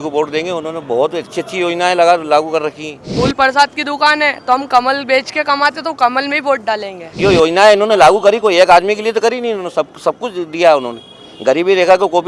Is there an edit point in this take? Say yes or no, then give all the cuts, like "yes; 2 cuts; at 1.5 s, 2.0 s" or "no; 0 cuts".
yes; 2 cuts; at 3.1 s, 7.1 s